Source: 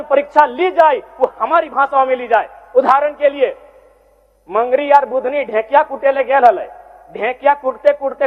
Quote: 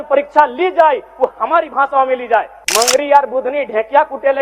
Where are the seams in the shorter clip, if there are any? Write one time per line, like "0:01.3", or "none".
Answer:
0:02.6